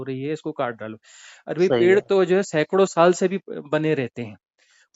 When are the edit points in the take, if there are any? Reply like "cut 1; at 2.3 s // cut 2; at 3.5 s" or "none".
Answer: none